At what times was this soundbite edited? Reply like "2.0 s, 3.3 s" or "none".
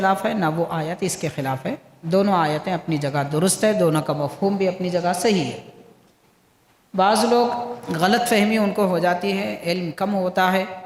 none